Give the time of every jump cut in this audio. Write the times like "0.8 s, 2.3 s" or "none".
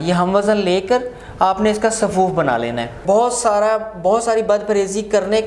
3.0 s

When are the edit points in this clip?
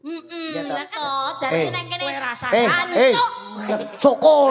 0.9 s

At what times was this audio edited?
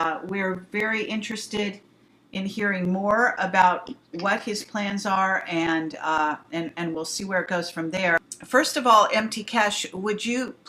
2.8 s

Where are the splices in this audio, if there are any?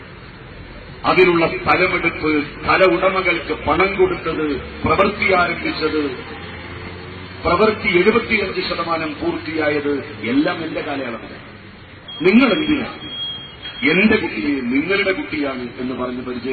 9.5 s

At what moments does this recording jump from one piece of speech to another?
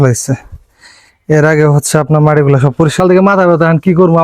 3.0 s

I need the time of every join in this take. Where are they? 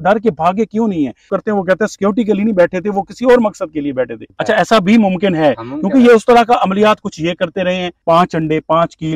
1.3 s, 4.2 s, 8.0 s

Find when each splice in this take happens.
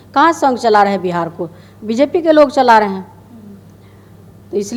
none

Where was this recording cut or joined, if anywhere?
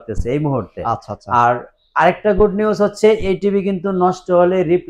none

